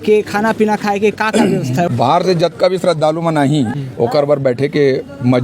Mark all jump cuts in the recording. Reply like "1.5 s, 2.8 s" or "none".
1.9 s, 3.8 s